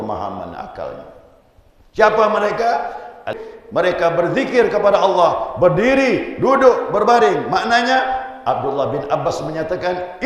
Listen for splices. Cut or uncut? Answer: cut